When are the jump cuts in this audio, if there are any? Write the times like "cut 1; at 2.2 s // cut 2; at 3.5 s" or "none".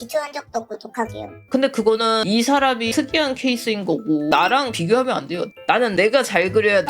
cut 1; at 1.2 s // cut 2; at 5.5 s

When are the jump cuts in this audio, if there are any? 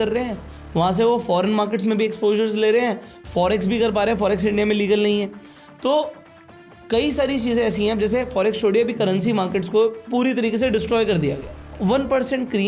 cut 1; at 11.7 s

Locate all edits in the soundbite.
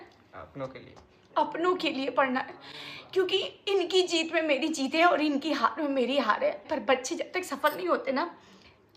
cut 1; at 6.7 s

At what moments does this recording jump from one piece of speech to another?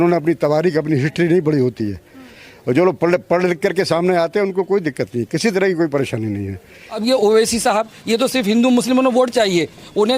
cut 1; at 6.9 s

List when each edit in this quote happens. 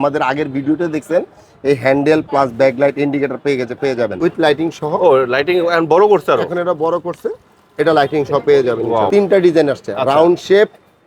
cut 1; at 4.1 s // cut 2; at 9.1 s

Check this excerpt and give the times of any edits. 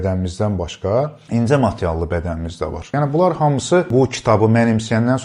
cut 1; at 1.2 s // cut 2; at 2.9 s // cut 3; at 3.9 s

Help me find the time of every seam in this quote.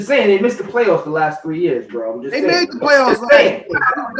none

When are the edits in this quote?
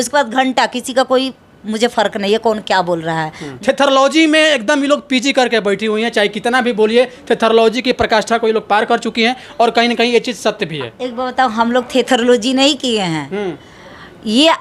cut 1; at 3.5 s

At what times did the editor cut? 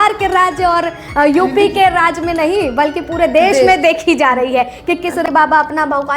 cut 1; at 5.3 s

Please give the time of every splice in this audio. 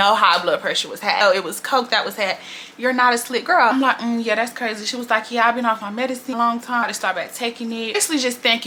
none

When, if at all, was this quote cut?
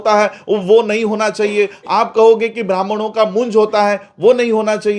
none

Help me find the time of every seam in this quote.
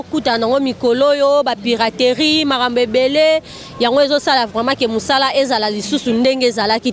none

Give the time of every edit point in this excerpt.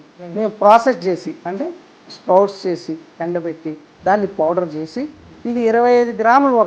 cut 1; at 5.2 s

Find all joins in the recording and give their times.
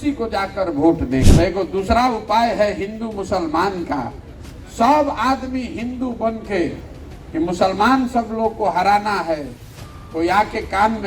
cut 1; at 1.3 s

